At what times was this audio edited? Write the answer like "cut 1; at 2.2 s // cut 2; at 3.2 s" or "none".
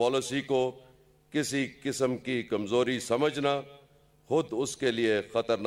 none